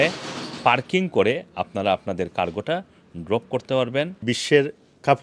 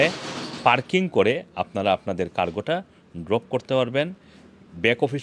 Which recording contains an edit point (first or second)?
first